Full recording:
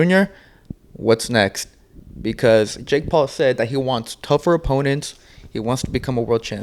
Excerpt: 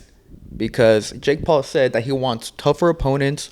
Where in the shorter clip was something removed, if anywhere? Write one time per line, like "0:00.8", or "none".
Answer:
none